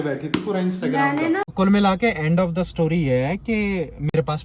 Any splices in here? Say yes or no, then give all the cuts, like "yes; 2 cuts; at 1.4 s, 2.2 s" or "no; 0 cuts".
yes; 1 cut; at 1.5 s